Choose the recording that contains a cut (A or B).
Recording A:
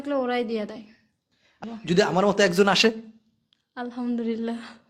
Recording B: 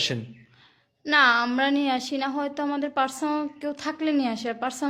A